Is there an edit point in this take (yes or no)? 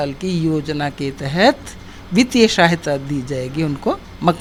no